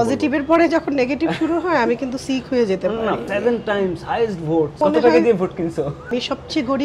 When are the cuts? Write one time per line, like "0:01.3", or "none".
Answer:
0:03.3
0:04.8
0:06.1